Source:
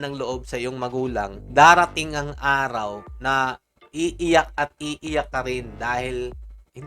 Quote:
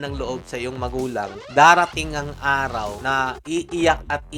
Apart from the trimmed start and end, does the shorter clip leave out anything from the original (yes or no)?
yes